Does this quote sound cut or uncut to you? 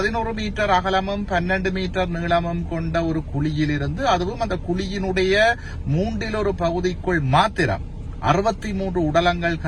uncut